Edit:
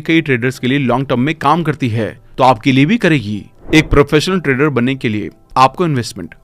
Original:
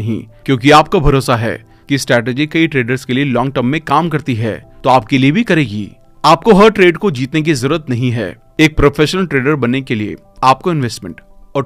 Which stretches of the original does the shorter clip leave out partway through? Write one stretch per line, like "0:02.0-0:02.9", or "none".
0:06.0-0:08.4

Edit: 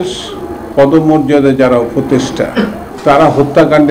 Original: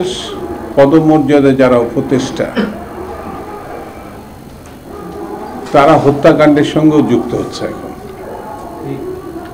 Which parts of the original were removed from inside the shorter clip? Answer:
0:02.9-0:05.5

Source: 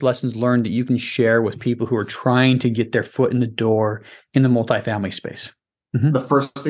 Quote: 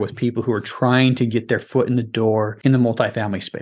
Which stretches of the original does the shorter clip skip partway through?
0:04.0-0:04.2

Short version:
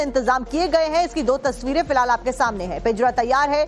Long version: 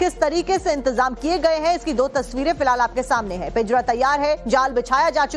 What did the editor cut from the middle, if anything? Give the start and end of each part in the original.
none

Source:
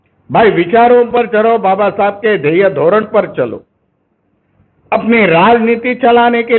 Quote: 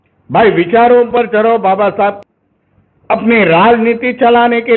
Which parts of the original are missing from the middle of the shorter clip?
0:02.2-0:04.0

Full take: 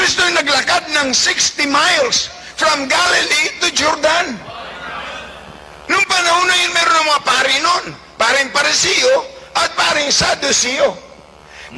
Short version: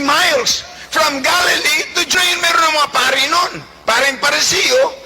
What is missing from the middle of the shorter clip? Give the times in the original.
0:03.8-0:06.5

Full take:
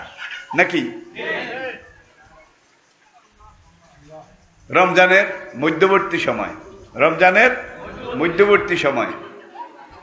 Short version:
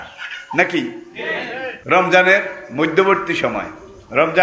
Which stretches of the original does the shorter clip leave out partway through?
0:01.8-0:04.6

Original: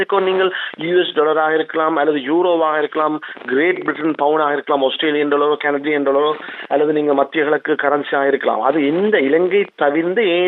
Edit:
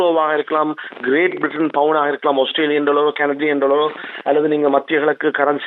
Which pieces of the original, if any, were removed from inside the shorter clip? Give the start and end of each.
none

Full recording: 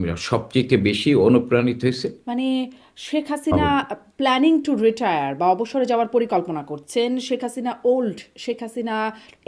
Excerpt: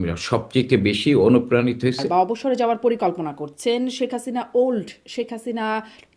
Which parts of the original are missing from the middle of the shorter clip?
0:02.0-0:05.3

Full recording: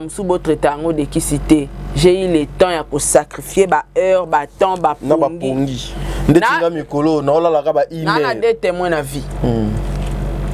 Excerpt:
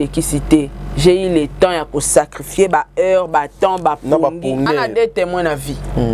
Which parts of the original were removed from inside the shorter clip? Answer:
0:05.7-0:08.1

